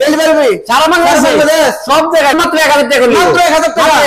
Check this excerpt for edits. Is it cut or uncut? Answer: cut